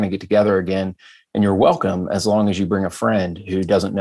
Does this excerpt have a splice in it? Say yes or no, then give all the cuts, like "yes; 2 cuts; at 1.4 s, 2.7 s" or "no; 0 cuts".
no; 0 cuts